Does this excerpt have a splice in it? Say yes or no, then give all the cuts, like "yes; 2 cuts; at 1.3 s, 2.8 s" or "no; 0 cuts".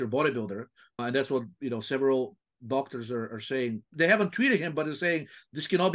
yes; 2 cuts; at 1.0 s, 3.9 s